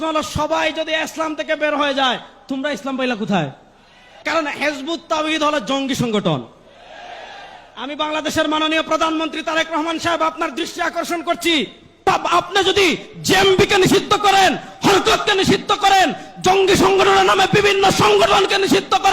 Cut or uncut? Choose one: cut